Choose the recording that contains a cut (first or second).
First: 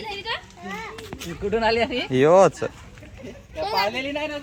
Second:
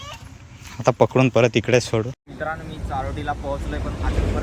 second